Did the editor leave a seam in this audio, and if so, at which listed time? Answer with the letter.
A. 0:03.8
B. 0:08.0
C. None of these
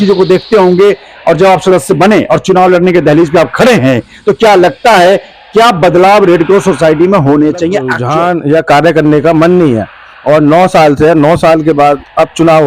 B